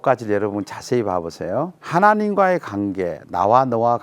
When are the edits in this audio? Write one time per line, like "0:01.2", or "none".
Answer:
0:01.8